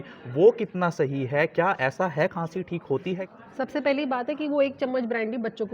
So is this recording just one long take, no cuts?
no; 1 cut; at 3.2 s

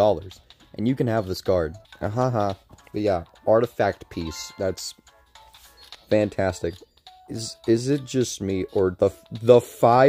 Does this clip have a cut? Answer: yes; 1 cut; at 1.9 s

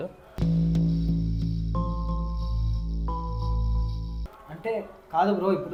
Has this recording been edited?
no; 0 cuts

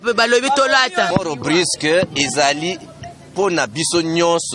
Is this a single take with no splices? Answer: no; 1 cut; at 1.1 s

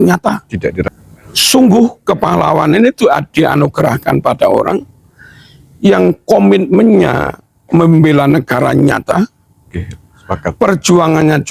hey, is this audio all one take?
no; 1 cut; at 0.9 s

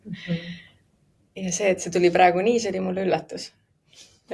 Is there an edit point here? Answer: no; 0 cuts

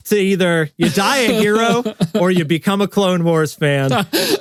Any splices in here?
no; 0 cuts

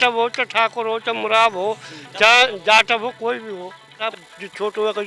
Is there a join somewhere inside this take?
yes; 1 cut; at 4.0 s

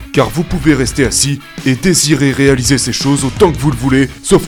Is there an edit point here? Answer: no; 0 cuts

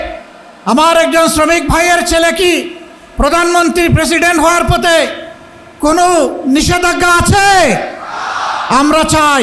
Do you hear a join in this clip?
no; 0 cuts

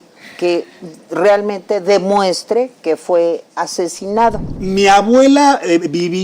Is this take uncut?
no; 1 cut; at 4.6 s

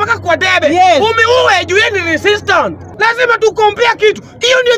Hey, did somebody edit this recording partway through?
yes; 1 cut; at 2.9 s

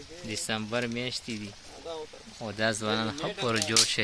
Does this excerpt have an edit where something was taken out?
no; 0 cuts

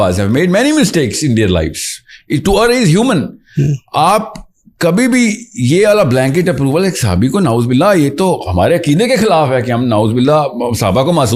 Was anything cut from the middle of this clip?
no; 0 cuts

